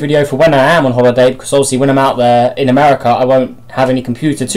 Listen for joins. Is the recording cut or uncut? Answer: cut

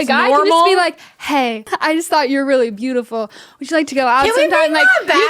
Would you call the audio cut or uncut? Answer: cut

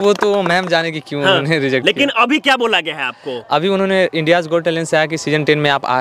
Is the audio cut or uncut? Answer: uncut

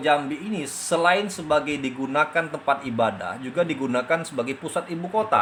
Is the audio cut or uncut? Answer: uncut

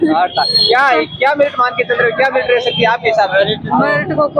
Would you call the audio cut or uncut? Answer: uncut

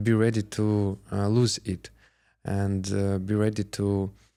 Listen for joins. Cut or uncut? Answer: uncut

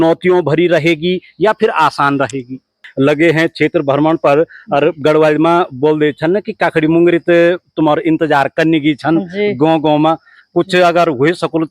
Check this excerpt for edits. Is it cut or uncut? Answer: cut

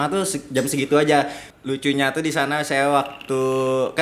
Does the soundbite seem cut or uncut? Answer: cut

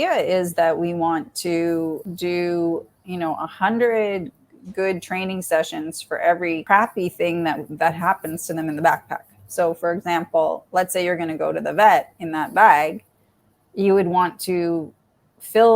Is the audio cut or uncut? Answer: cut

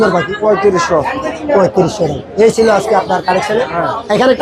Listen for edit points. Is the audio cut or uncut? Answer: uncut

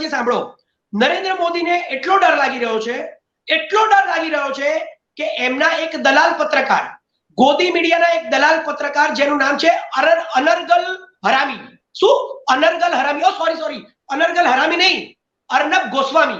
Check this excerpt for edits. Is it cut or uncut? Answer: uncut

